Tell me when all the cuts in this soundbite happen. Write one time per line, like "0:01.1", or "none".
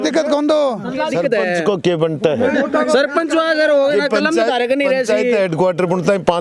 0:01.1

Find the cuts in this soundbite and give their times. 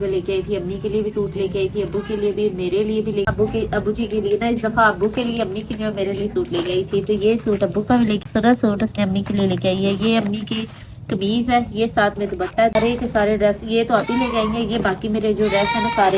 0:03.3
0:08.2
0:12.8

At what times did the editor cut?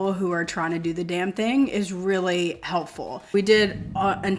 0:03.3

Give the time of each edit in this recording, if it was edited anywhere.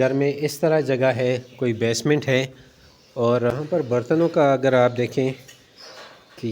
0:03.5

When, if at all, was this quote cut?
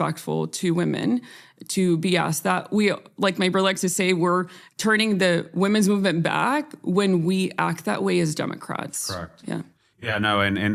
none

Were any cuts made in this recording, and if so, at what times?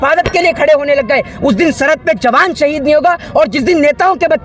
none

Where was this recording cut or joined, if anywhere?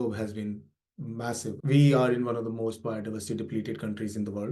none

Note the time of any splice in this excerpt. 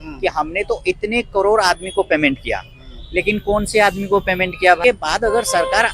0:04.8

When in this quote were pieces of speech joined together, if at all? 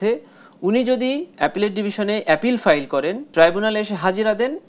0:01.3
0:03.2

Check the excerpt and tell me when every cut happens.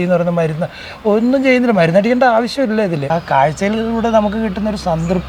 0:03.1

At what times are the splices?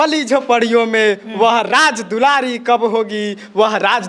none

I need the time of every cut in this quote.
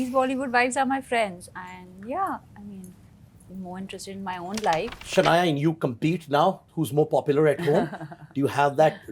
0:05.0

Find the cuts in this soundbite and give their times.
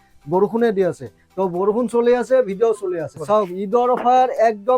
0:03.2

